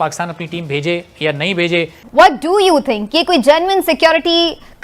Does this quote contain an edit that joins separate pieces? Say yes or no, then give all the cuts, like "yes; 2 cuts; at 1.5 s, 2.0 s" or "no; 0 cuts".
yes; 1 cut; at 2.0 s